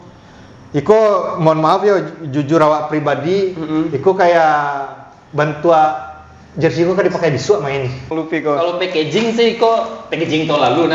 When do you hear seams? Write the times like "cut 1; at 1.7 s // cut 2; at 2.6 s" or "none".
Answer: cut 1; at 8.2 s